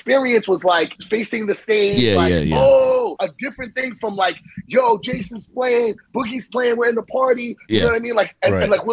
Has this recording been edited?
yes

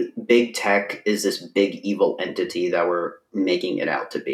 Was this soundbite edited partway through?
no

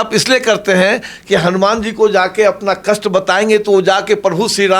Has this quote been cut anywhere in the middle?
no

